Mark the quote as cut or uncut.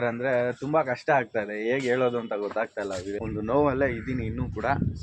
cut